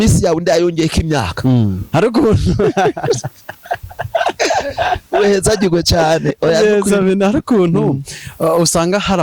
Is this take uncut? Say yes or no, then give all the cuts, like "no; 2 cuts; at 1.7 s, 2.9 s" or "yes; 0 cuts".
no; 1 cut; at 1.8 s